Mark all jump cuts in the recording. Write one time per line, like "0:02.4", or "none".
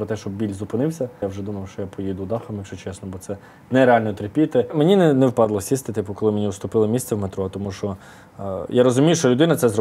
0:01.2
0:04.7